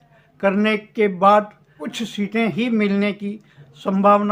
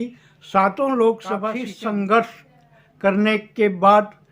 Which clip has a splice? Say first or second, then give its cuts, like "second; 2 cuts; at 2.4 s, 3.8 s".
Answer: second; 1 cut; at 1.6 s